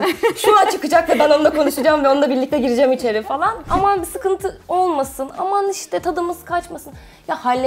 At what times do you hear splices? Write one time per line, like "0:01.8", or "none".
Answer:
0:03.7